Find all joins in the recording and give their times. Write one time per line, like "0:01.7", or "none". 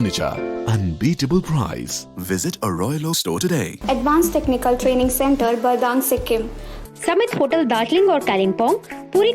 0:03.7
0:06.7